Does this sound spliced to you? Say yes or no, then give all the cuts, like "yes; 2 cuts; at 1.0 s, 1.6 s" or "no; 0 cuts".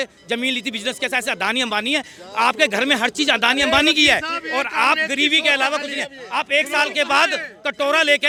no; 0 cuts